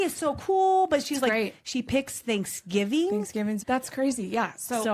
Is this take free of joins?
no; 1 cut; at 3.6 s

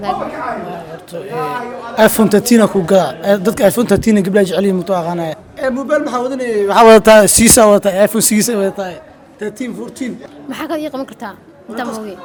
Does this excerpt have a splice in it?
no; 0 cuts

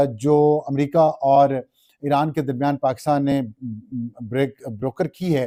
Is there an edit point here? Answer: no; 0 cuts

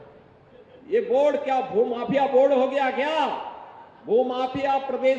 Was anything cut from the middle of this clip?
no; 0 cuts

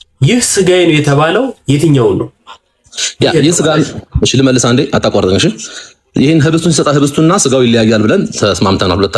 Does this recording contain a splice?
no; 0 cuts

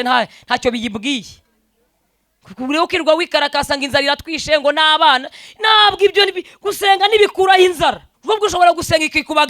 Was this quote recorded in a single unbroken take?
no; 1 cut; at 8.1 s

